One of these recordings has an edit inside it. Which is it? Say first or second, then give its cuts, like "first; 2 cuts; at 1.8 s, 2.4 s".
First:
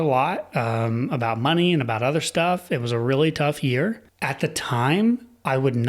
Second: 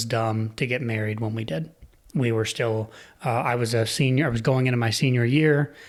first; 1 cut; at 4.1 s